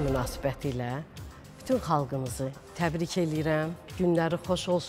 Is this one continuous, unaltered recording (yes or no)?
no